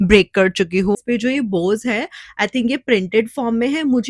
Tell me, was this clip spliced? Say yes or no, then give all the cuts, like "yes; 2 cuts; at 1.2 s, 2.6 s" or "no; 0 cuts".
yes; 1 cut; at 1.0 s